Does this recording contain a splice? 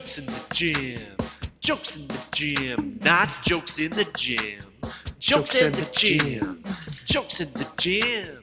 no; 0 cuts

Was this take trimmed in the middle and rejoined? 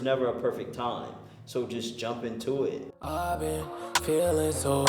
yes; 1 cut; at 2.9 s

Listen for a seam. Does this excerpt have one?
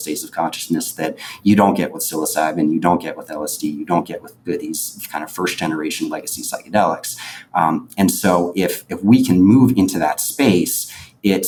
no; 0 cuts

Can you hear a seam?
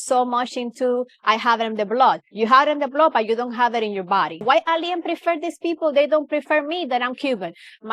yes; 1 cut; at 4.5 s

